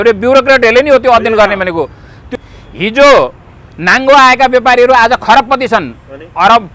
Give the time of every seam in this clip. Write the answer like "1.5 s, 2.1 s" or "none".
2.3 s